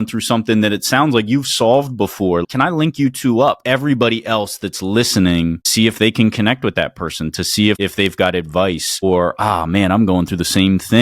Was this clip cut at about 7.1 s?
no; 3 cuts; at 2.4 s, 3.6 s, 5.6 s

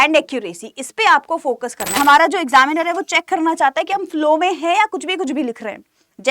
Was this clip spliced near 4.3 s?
no; 1 cut; at 1.9 s

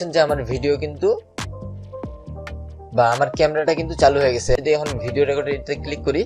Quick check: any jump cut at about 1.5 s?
no; 1 cut; at 4.6 s

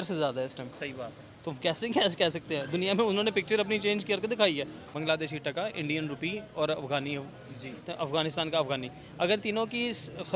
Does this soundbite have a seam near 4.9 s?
yes; 1 cut; at 4.9 s

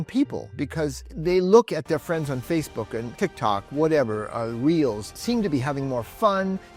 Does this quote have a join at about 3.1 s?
yes; 3 cuts; at 1.1 s, 3.1 s, 5.1 s

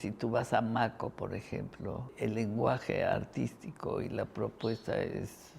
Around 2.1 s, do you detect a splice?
yes; 1 cut; at 2.1 s

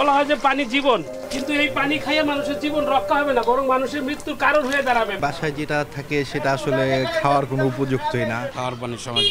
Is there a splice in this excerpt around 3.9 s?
no; 3 cuts; at 1.2 s, 5.1 s, 8.5 s

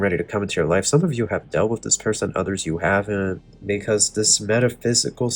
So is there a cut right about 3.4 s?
yes; 1 cut; at 3.4 s

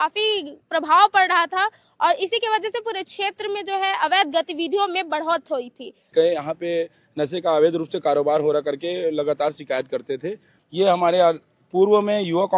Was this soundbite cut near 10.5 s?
yes; 2 cuts; at 6.1 s, 10.5 s

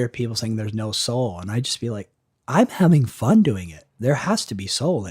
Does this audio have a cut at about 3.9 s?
yes; 1 cut; at 3.9 s

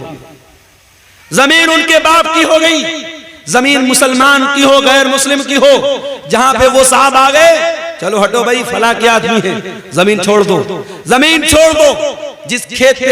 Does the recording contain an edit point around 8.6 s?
no; 0 cuts

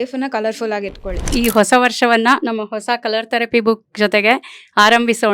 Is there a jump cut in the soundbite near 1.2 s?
yes; 1 cut; at 1.2 s

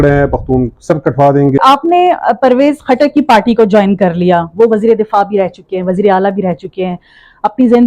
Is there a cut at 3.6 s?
no; 1 cut; at 1.6 s

